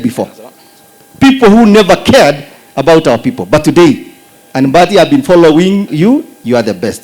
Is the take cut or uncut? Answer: cut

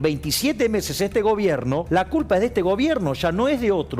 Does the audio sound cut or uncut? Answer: cut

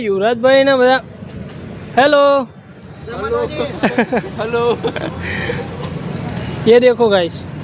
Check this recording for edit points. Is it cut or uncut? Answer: uncut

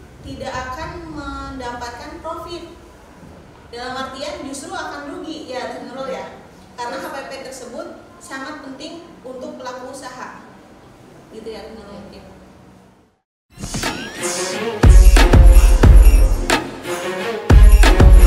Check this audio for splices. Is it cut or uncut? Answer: cut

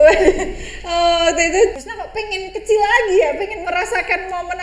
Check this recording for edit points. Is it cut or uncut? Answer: cut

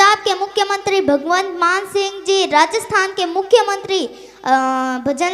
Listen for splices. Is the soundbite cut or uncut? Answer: uncut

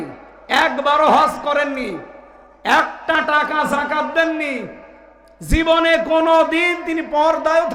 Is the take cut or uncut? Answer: uncut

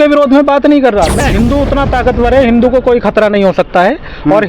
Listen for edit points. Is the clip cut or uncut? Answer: cut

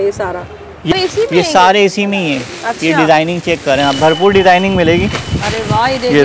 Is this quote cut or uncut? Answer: cut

